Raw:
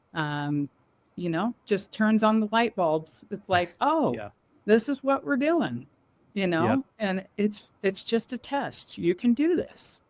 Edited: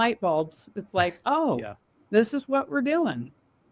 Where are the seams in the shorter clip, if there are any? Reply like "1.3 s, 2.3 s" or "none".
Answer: none